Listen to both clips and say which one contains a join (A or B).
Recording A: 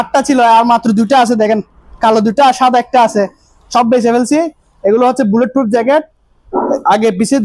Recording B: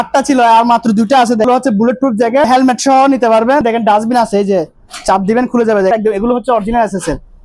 B